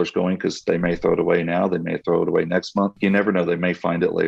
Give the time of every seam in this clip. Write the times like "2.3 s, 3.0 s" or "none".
2.9 s

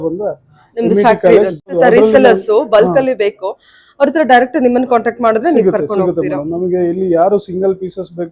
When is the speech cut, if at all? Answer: 1.7 s

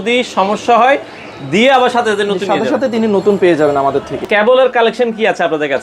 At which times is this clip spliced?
4.2 s

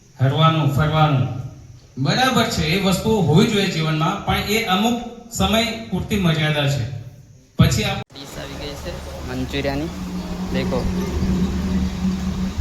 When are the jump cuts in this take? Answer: 8.0 s

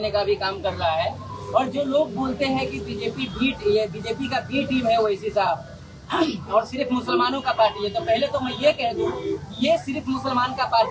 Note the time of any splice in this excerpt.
none

